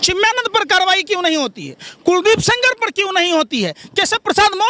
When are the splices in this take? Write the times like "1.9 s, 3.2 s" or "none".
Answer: none